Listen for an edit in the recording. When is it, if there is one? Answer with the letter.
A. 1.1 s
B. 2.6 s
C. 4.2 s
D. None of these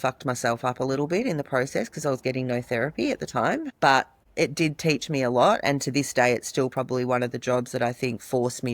C